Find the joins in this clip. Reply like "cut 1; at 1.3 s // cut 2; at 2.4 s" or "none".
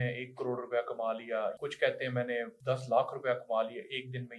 cut 1; at 1.6 s // cut 2; at 2.5 s